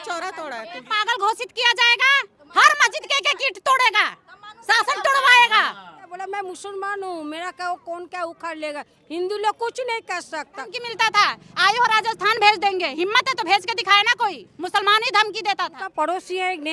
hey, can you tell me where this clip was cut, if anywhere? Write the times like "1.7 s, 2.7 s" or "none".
0.9 s, 6.2 s, 10.8 s, 15.8 s

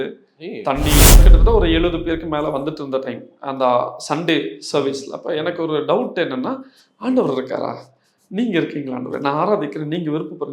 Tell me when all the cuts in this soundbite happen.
1.2 s

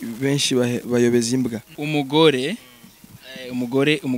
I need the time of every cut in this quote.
1.7 s

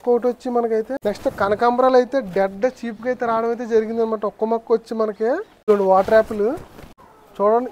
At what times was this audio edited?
0.9 s, 5.6 s

